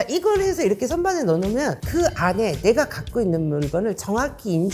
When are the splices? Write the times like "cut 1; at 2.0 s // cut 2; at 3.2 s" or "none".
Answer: cut 1; at 1.8 s